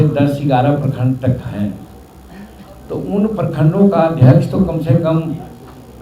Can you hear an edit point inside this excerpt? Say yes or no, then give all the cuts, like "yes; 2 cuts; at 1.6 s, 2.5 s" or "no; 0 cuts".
no; 0 cuts